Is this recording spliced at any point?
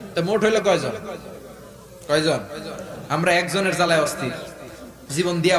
no; 0 cuts

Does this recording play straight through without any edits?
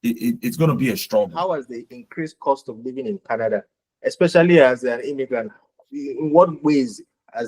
no; 1 cut; at 1.3 s

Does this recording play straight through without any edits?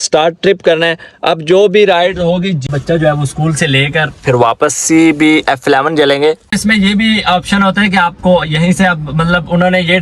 no; 2 cuts; at 2.6 s, 6.5 s

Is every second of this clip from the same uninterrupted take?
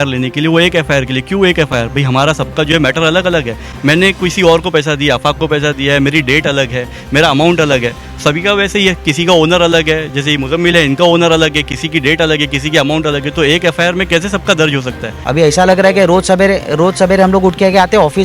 no; 1 cut; at 15.1 s

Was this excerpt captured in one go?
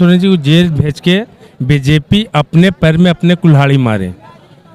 yes; 0 cuts

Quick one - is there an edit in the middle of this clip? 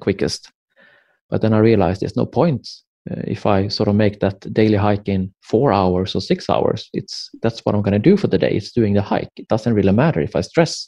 no; 0 cuts

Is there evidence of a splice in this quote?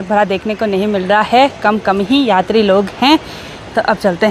no; 0 cuts

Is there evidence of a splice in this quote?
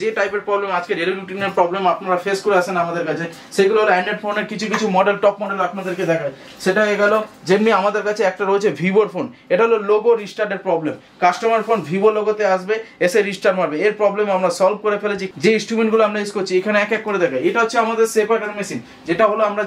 yes; 1 cut; at 15.2 s

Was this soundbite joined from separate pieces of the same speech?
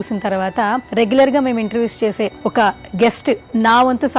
yes; 1 cut; at 2.4 s

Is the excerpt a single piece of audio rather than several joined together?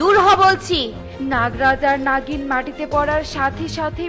no; 1 cut; at 1.1 s

